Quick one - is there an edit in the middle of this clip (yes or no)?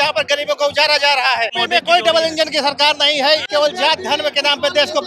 yes